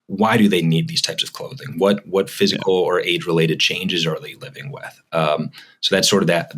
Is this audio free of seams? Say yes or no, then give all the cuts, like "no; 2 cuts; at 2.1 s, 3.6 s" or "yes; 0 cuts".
yes; 0 cuts